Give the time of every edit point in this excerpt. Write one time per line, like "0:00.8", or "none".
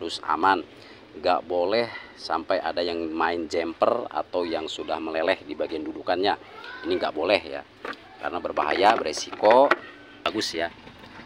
0:10.2